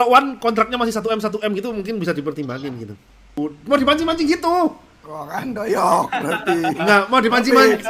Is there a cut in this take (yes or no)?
yes